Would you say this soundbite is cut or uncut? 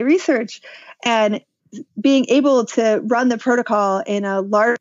cut